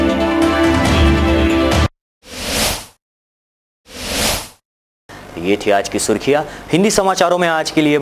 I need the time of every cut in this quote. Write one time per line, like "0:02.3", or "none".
none